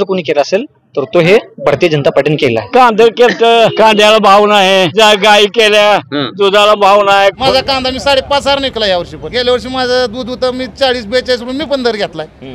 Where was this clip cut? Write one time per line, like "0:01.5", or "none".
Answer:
0:02.7
0:03.7
0:04.9
0:07.4
0:09.2